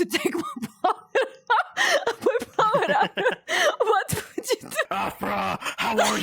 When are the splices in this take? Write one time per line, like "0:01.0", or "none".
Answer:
0:04.9